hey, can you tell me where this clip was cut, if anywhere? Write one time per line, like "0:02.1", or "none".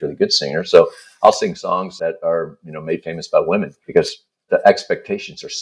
0:01.9
0:03.8